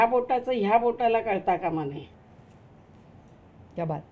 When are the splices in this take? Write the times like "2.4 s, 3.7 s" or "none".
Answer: 2.1 s